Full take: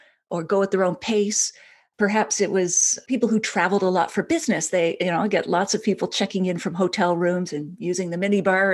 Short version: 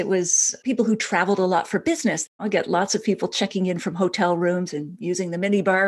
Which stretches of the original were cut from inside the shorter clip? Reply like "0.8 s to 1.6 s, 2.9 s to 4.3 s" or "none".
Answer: 4.7 s to 5.1 s